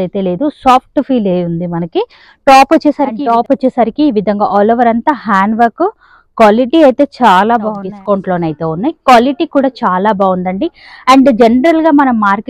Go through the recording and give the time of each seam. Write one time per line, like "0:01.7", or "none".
0:03.1
0:07.9

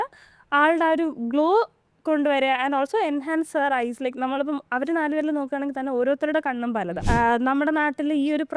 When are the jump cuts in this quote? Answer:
0:07.0

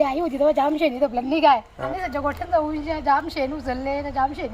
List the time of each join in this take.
0:01.8

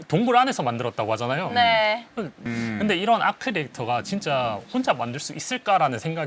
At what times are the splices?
0:02.4

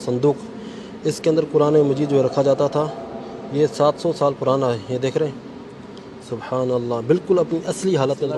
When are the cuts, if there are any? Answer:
none

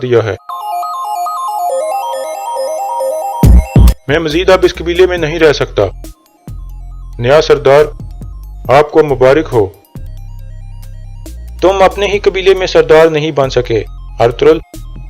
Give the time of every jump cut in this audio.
0:10.3

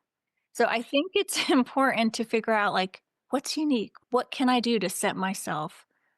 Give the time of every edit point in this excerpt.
0:03.9

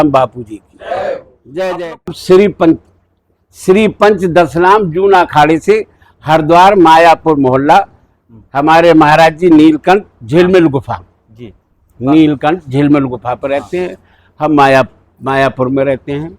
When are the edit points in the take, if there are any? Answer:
0:02.1

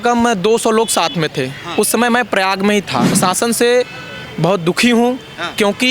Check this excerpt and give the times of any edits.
0:03.1

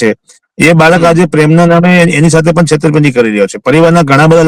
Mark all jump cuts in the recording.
none

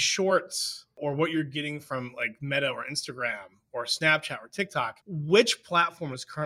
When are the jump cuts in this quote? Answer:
0:00.9
0:05.0

